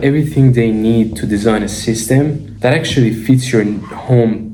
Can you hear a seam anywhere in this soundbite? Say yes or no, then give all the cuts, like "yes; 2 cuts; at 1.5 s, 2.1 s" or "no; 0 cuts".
no; 0 cuts